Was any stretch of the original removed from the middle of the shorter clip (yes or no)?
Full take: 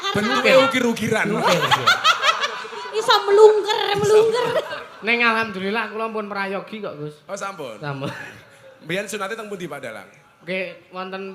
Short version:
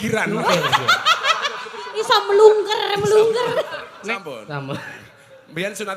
yes